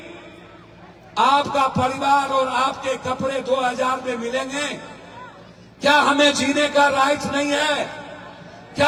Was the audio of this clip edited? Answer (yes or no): no